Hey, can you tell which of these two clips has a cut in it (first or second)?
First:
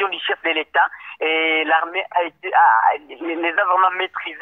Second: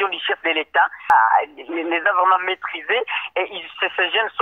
second